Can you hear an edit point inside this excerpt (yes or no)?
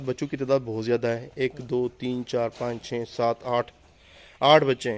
no